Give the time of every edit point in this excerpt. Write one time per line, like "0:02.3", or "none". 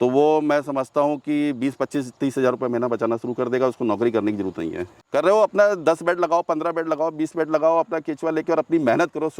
0:04.8